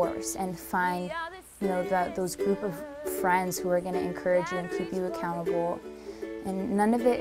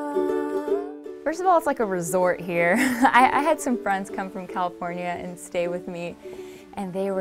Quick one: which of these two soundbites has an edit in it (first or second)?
first